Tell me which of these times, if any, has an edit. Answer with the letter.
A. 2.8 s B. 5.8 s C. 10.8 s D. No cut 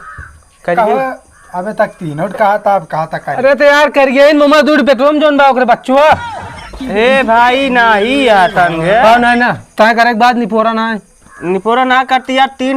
D